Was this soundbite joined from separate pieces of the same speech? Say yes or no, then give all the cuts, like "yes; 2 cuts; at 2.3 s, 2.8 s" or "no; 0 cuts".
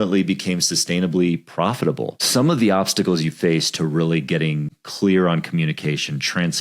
yes; 1 cut; at 2.2 s